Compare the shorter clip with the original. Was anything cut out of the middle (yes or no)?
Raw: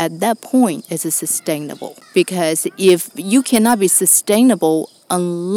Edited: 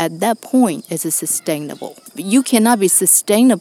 yes